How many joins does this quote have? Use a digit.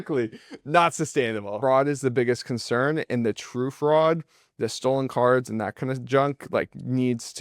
1